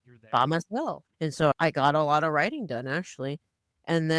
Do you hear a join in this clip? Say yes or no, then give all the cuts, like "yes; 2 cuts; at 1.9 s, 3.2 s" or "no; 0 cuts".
yes; 1 cut; at 1.0 s